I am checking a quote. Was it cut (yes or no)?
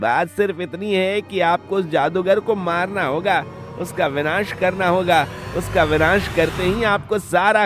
no